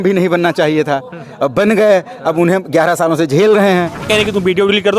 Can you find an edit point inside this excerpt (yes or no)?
yes